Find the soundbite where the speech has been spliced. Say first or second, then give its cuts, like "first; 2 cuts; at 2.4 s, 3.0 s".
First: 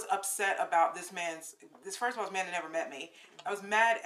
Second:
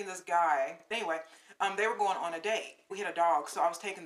second; 2 cuts; at 1.2 s, 2.9 s